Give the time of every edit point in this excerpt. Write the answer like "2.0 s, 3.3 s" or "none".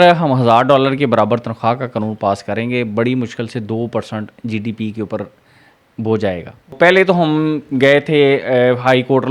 6.8 s